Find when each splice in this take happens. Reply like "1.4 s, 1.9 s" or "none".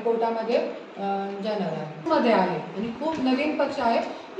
2.0 s